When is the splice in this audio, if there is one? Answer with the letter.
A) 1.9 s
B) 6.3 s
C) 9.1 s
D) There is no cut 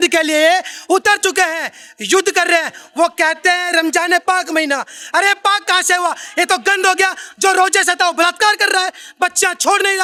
D